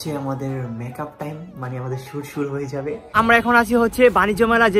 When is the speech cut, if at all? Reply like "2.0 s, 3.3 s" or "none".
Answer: 3.1 s